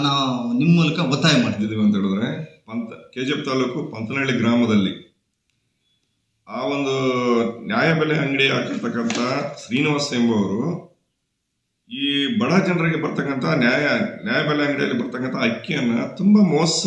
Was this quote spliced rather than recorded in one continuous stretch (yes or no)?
yes